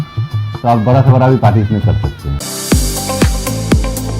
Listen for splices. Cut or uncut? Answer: cut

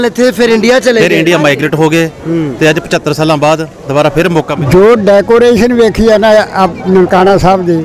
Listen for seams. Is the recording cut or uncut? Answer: cut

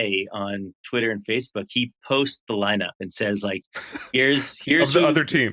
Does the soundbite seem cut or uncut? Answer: uncut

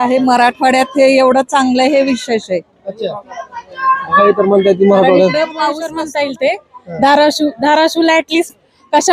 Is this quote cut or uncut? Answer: cut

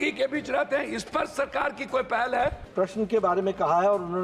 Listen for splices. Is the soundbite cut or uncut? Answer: cut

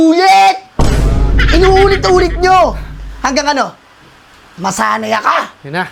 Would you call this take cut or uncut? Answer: uncut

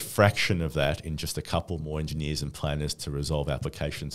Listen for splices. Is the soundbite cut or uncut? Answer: uncut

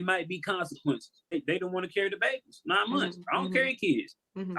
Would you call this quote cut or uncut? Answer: cut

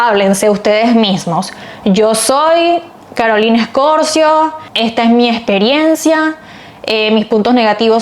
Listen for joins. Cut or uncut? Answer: uncut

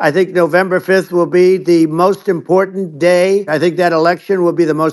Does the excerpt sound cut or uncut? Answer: cut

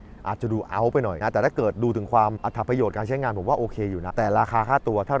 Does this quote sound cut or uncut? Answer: cut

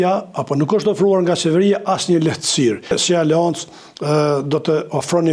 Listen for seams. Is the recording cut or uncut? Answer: cut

